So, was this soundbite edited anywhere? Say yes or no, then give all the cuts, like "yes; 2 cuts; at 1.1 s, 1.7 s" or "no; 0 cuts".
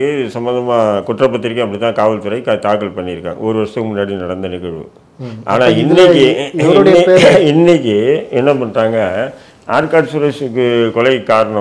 no; 0 cuts